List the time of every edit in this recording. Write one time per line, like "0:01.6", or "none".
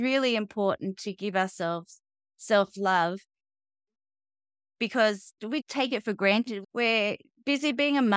0:05.4
0:06.6